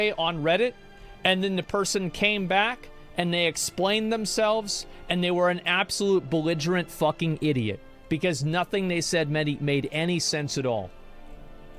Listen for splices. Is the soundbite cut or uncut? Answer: uncut